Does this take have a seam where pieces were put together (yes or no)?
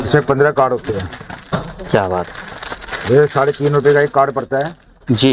no